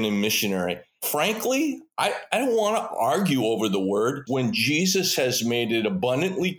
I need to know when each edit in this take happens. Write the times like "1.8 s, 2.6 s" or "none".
1.0 s, 4.2 s